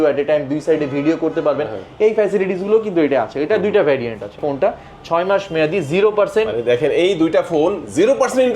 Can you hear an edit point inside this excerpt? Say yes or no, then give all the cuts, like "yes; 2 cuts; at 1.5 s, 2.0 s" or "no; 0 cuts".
yes; 1 cut; at 4.4 s